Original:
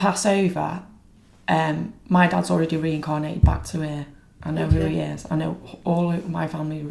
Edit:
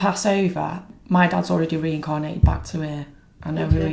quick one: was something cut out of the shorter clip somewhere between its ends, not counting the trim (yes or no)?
yes